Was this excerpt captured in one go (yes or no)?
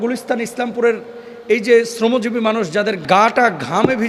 no